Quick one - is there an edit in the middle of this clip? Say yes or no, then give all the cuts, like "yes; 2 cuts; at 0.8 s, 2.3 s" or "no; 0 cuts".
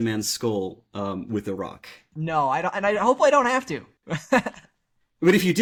no; 0 cuts